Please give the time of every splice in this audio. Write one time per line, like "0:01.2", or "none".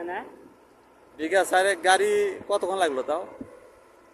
none